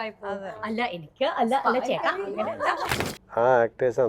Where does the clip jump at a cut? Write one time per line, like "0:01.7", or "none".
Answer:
0:03.0